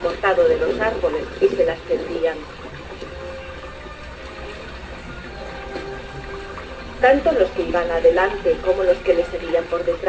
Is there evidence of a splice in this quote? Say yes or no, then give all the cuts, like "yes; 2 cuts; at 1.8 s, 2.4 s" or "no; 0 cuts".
no; 0 cuts